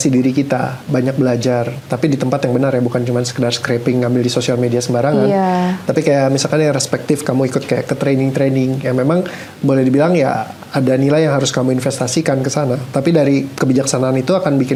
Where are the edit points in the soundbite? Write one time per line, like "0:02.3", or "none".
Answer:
none